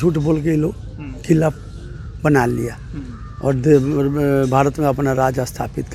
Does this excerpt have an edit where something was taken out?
no; 0 cuts

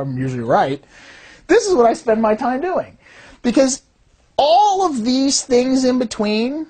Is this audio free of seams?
yes; 0 cuts

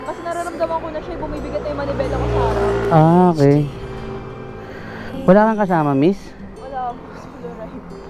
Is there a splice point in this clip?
no; 0 cuts

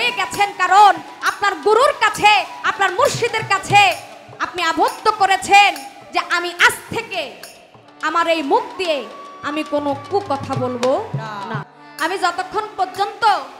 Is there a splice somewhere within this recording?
yes; 1 cut; at 11.7 s

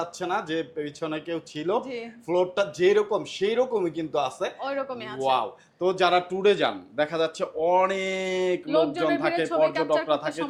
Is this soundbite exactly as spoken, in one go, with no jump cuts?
yes; 0 cuts

